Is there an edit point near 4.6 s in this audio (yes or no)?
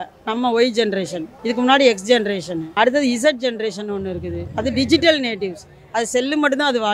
no